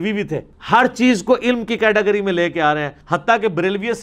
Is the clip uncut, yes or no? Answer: no